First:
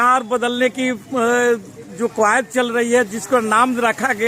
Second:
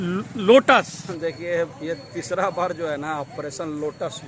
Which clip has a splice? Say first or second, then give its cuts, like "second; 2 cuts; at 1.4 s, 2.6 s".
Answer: second; 1 cut; at 1.0 s